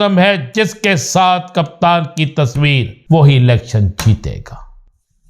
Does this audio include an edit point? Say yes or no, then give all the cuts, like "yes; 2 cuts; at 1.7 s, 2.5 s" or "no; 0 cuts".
yes; 1 cut; at 2.9 s